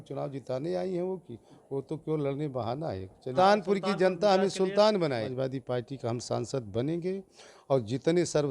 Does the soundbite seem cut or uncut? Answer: cut